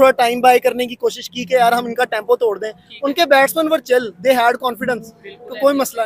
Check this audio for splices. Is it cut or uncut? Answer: uncut